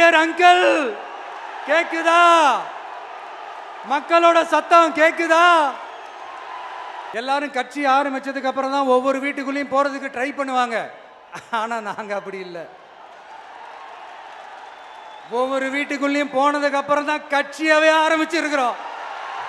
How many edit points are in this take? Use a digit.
1